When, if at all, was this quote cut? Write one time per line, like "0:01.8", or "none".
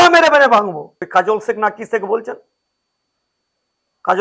0:00.9